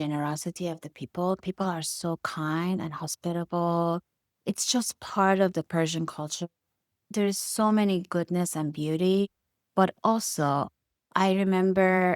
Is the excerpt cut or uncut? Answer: cut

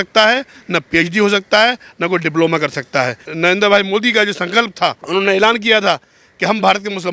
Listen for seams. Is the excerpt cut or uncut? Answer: cut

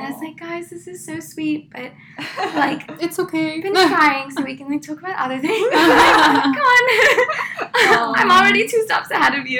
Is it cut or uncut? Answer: uncut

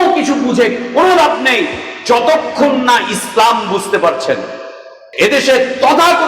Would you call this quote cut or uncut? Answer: cut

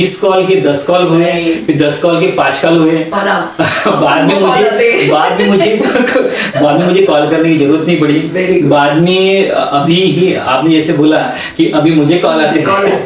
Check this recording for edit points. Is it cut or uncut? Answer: uncut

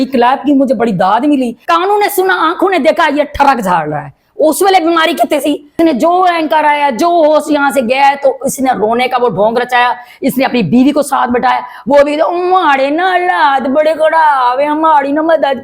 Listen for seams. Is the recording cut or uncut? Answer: cut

